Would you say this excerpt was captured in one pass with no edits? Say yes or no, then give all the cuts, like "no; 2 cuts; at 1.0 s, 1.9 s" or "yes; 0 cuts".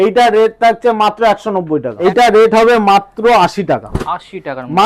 no; 1 cut; at 1.9 s